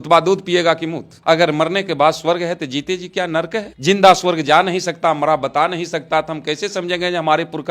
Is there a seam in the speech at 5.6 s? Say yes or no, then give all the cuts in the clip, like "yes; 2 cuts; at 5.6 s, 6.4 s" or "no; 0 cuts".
no; 1 cut; at 1.2 s